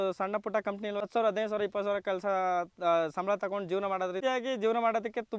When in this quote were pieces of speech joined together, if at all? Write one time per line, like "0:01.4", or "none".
0:01.0
0:04.2